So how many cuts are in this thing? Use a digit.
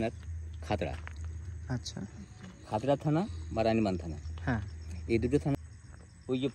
1